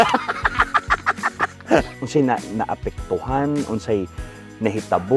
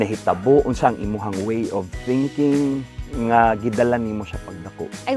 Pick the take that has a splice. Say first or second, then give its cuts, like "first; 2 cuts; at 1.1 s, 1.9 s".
first; 1 cut; at 1.9 s